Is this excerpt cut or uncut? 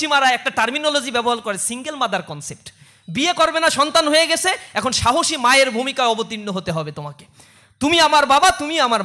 uncut